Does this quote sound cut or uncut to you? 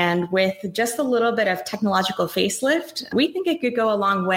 cut